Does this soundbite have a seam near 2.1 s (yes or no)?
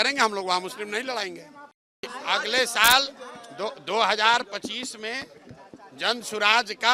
yes